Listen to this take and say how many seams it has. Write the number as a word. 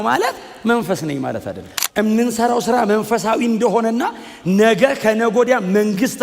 one